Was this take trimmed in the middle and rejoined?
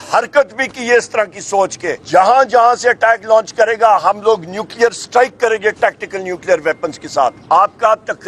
yes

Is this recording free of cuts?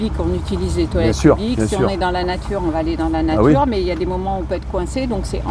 yes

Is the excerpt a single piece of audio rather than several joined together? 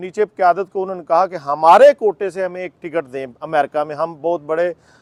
yes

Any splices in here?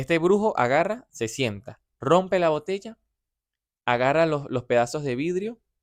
no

